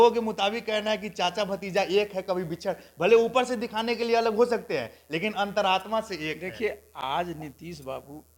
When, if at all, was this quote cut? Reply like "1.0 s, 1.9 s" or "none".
none